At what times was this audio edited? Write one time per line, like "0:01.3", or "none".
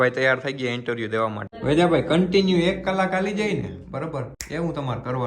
0:01.5
0:04.4

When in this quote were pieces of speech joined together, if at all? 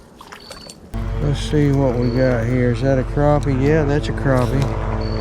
0:00.9

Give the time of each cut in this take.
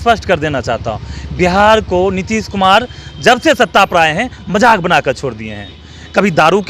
none

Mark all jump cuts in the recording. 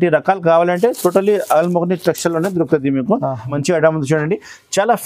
0:03.5

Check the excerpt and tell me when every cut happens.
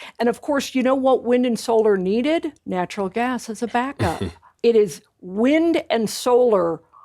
0:02.6
0:04.4

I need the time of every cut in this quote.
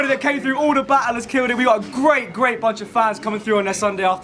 0:02.6

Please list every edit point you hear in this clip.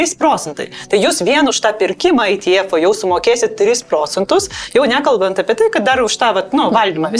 none

